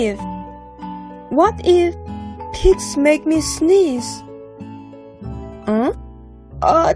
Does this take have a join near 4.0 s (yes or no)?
no